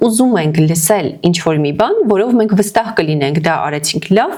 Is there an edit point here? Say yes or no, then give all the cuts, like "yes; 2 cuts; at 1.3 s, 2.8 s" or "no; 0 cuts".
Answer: no; 0 cuts